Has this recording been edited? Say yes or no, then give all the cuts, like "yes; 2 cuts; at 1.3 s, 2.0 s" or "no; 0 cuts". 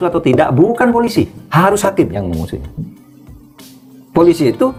no; 0 cuts